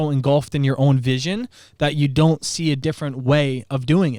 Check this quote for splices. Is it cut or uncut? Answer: uncut